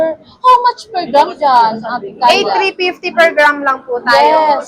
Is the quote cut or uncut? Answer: uncut